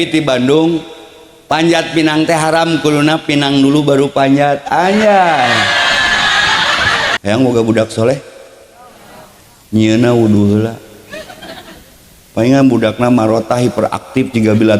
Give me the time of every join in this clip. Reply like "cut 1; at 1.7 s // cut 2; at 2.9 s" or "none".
cut 1; at 7.2 s